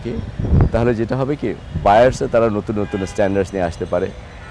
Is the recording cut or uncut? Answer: uncut